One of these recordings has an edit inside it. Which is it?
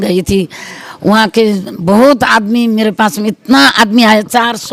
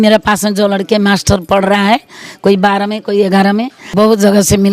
second; 1 cut; at 3.8 s

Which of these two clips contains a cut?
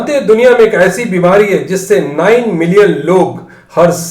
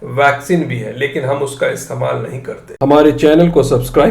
second; 1 cut; at 2.6 s

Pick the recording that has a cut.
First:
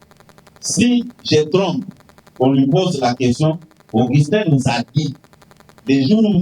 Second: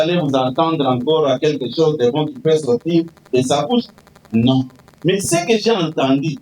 second; 1 cut; at 4.8 s

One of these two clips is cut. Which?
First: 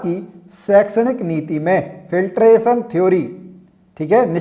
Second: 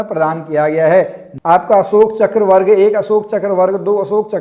second; 1 cut; at 1.2 s

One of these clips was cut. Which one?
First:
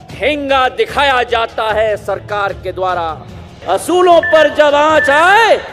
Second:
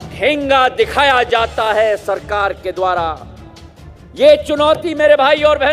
first; 1 cut; at 3.5 s

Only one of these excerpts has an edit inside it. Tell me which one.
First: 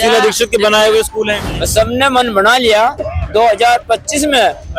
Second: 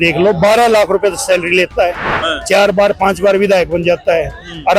first; 1 cut; at 1.4 s

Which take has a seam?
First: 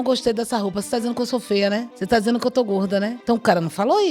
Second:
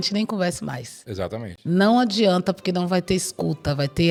first; 2 cuts; at 1.9 s, 3.2 s

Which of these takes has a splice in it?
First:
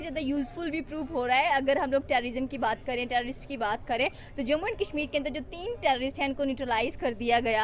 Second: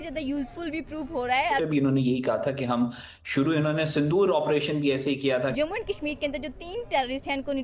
second; 2 cuts; at 1.6 s, 5.5 s

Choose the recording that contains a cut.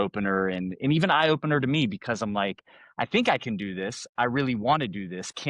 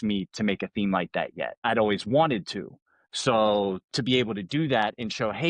second; 1 cut; at 1.6 s

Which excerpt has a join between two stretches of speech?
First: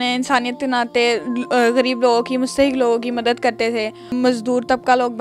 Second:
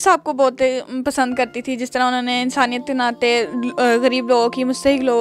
first; 1 cut; at 4.1 s

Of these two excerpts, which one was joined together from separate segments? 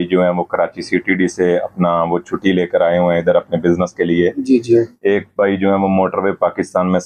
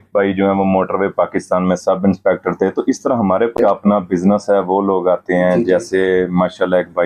second; 1 cut; at 3.6 s

